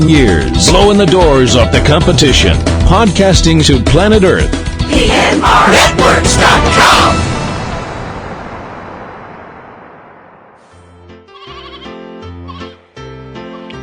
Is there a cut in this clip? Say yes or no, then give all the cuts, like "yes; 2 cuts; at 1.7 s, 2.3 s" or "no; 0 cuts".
yes; 1 cut; at 10.9 s